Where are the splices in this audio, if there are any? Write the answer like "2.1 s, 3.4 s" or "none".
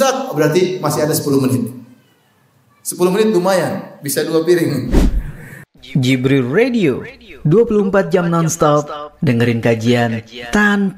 4.9 s